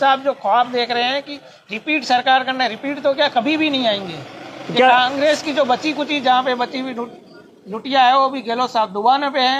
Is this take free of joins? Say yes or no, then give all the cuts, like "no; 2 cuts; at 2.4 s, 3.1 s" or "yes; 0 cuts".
yes; 0 cuts